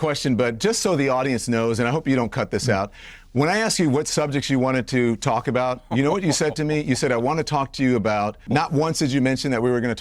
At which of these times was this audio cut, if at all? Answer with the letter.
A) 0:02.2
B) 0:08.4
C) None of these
B